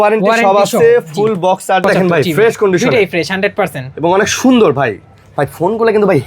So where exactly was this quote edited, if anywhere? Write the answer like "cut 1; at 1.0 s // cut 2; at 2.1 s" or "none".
cut 1; at 1.8 s

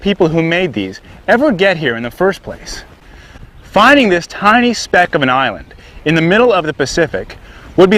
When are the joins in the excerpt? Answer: none

